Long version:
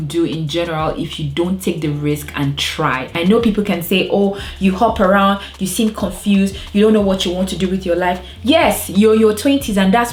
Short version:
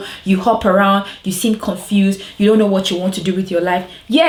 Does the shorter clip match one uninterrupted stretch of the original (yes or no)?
yes